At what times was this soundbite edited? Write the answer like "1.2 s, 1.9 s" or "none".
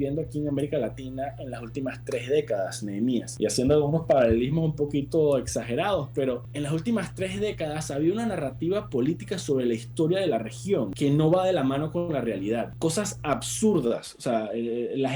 3.3 s, 6.5 s, 10.9 s, 12.7 s